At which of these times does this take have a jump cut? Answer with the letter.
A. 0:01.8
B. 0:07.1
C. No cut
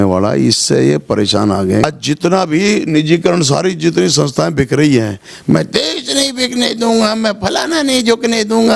A